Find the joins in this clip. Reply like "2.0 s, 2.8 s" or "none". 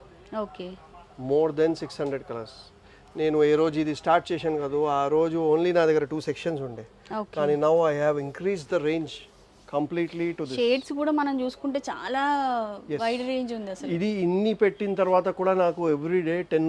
none